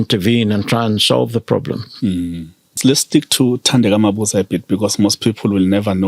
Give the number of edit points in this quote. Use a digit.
1